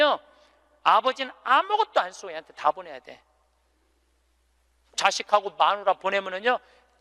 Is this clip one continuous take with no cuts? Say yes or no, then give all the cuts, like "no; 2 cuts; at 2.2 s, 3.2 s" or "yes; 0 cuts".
no; 1 cut; at 4.9 s